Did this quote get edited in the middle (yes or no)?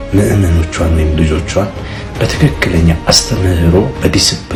no